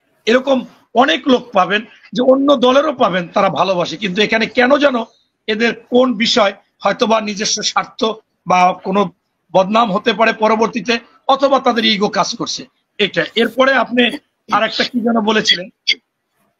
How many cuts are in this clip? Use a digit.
0